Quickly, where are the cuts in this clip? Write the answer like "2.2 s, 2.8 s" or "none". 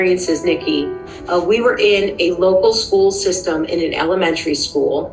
none